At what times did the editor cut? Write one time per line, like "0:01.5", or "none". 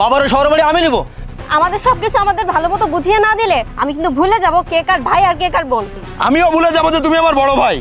0:01.2
0:05.9